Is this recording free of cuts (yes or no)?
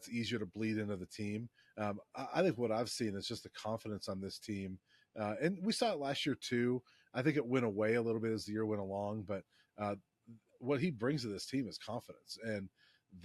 yes